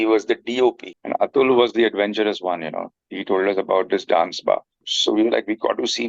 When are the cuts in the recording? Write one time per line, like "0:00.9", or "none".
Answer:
0:00.9
0:04.9

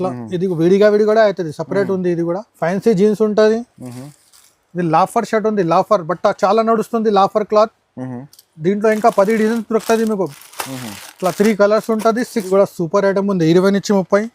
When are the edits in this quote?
0:02.5
0:12.5

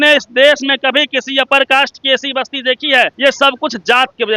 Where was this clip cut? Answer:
0:03.1

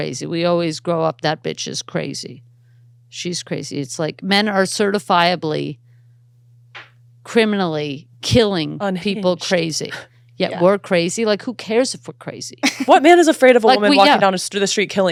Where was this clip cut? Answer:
none

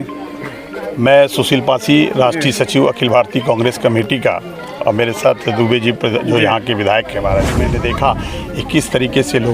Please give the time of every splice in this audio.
0:07.7

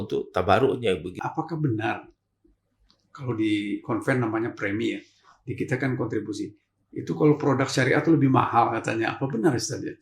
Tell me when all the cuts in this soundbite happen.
0:01.2

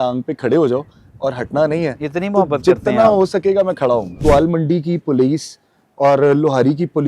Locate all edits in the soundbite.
0:04.2

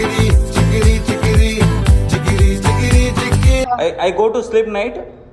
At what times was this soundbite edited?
0:03.7

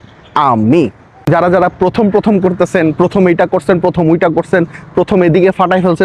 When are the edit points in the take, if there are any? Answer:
0:01.1

